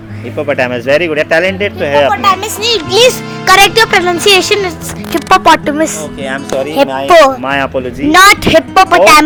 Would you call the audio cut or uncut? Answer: uncut